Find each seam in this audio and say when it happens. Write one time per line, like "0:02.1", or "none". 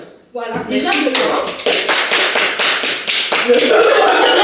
none